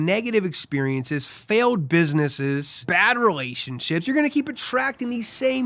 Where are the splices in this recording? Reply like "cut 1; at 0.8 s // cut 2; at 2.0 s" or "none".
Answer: cut 1; at 2.8 s